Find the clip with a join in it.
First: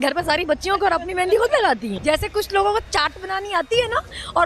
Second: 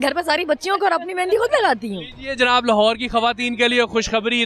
first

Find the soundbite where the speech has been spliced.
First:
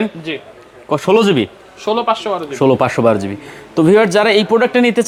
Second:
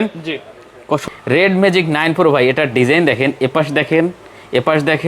second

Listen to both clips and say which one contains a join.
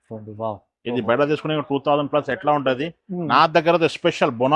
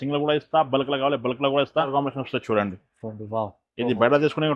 second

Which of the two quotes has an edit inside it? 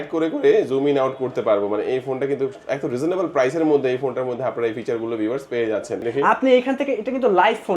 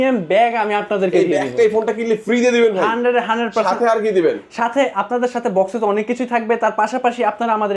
first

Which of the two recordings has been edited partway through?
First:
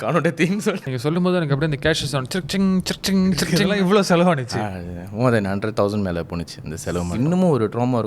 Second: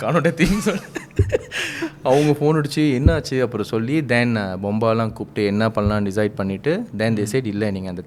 first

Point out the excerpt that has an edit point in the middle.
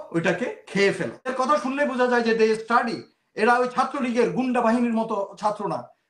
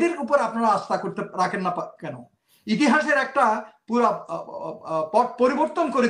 first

